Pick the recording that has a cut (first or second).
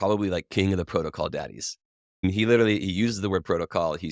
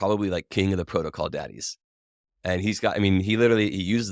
first